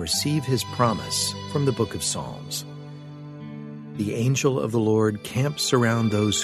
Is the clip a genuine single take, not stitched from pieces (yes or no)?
yes